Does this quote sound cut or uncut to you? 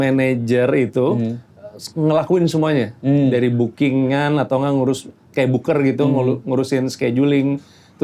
uncut